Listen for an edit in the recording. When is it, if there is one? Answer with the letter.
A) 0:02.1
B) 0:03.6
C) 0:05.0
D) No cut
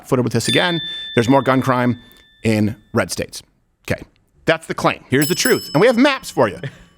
C